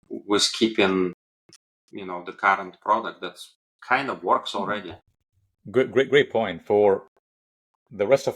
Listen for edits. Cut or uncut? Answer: uncut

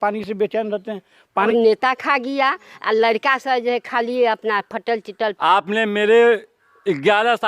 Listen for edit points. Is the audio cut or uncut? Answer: cut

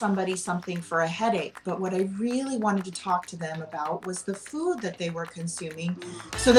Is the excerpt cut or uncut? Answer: uncut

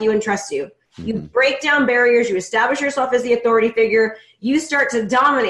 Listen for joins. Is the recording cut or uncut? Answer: uncut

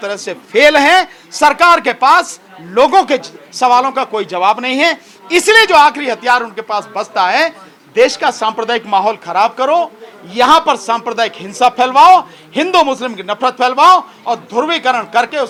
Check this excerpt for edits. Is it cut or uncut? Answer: uncut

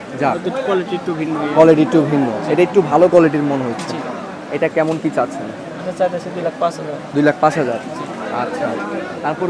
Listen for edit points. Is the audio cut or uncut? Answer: uncut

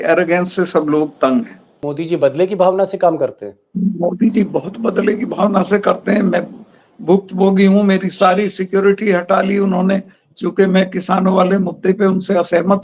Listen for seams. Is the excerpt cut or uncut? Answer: cut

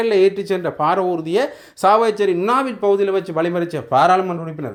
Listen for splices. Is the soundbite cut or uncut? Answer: uncut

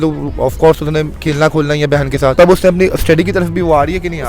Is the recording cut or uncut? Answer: cut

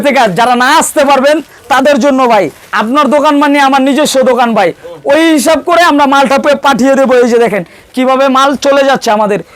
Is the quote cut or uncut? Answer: uncut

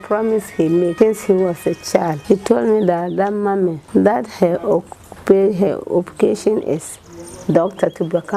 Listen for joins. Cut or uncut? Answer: cut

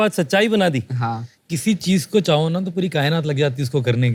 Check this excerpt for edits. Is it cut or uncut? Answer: uncut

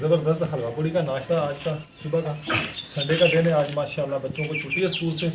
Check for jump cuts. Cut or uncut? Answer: uncut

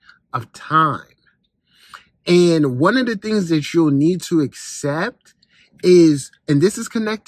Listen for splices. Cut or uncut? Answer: uncut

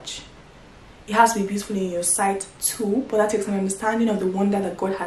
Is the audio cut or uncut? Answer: uncut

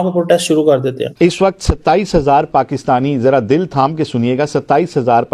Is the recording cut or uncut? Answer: cut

